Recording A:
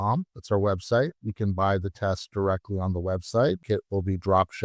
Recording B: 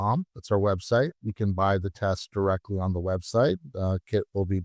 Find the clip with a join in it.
A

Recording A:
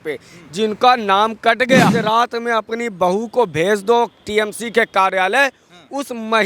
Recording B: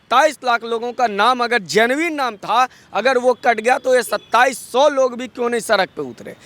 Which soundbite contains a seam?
A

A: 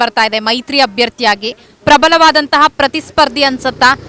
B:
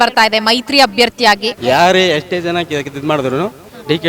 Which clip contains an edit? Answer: B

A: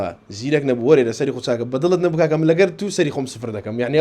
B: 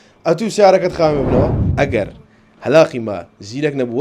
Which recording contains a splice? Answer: B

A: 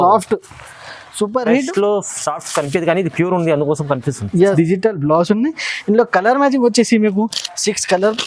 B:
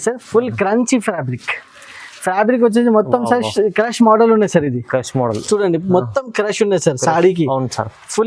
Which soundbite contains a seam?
A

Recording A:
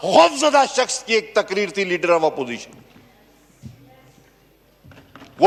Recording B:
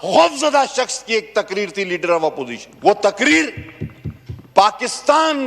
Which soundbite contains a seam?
B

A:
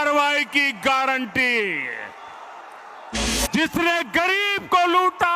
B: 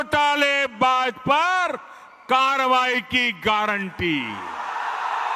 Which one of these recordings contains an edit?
A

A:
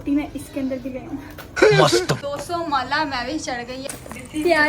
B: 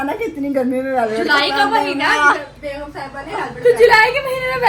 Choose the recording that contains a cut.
A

